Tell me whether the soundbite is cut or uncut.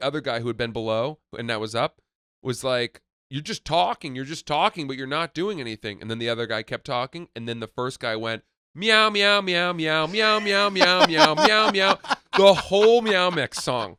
uncut